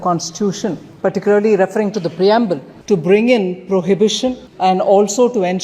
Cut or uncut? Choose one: cut